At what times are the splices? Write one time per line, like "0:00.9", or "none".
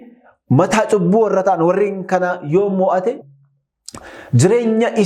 0:03.2